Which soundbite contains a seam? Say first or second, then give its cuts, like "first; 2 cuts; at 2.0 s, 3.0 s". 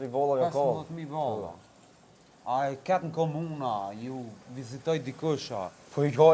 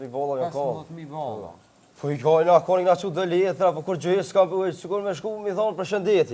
second; 1 cut; at 1.8 s